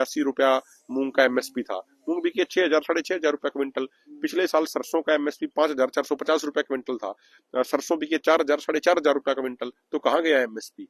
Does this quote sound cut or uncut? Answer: uncut